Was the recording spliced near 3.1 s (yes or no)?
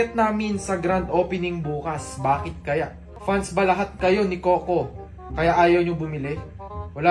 yes